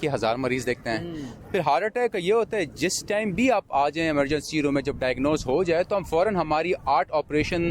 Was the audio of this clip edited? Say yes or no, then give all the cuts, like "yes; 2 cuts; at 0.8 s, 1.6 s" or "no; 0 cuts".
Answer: no; 0 cuts